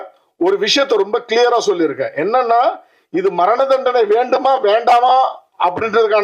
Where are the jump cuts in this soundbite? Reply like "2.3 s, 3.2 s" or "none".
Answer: none